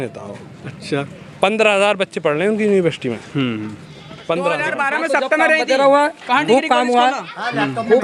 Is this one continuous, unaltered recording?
no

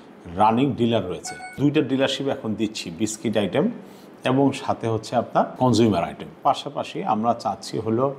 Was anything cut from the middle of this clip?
yes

